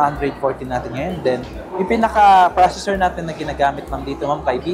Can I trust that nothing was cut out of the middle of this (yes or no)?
yes